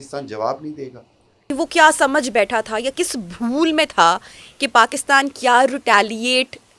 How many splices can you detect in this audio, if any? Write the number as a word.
one